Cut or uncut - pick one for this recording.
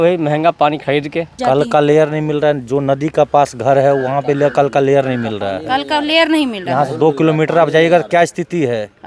cut